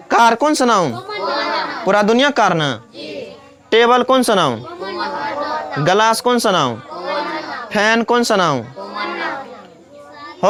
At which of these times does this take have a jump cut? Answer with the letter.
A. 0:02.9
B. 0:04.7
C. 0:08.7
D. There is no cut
D